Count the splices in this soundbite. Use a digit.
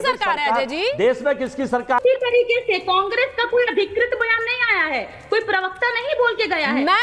1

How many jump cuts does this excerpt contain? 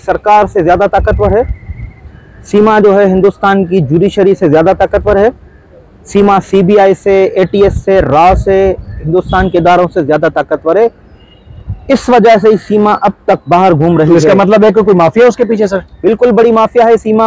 0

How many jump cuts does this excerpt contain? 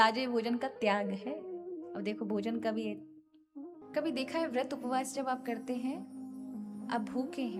1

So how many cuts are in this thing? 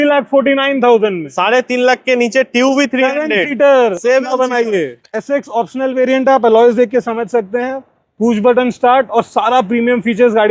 1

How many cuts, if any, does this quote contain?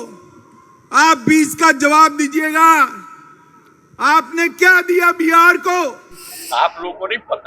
1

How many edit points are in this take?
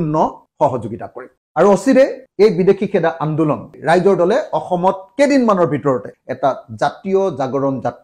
3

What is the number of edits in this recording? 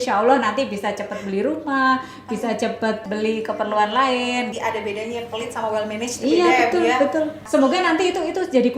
3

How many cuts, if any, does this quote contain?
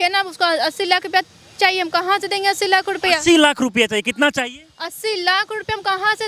0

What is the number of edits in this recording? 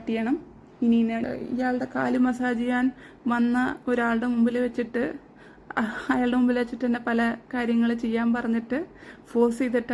1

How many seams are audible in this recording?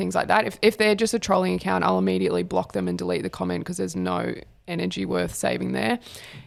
0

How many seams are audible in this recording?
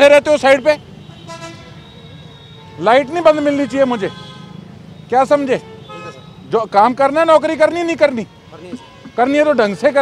0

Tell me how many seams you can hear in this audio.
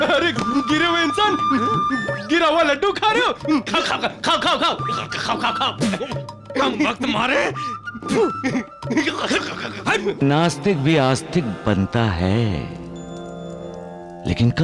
1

